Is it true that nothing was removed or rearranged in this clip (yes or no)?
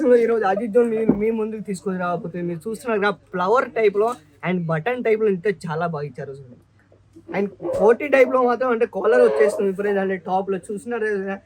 yes